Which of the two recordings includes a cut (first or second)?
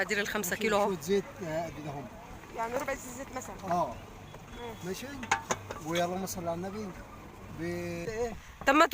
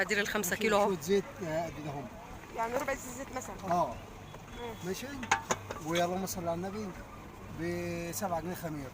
first